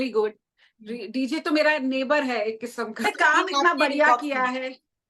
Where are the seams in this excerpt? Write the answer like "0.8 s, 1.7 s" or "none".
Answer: 3.1 s